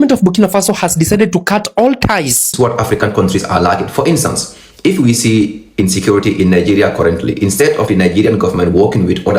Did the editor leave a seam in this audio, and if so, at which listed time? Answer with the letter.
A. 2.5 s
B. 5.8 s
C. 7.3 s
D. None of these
A